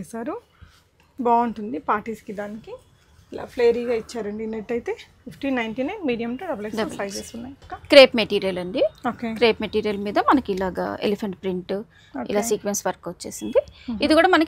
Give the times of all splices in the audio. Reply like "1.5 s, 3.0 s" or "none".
none